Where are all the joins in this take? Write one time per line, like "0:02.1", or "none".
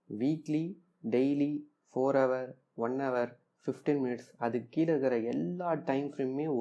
none